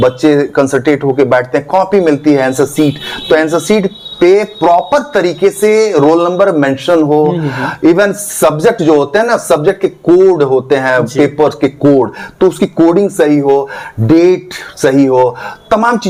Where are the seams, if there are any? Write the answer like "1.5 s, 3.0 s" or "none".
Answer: none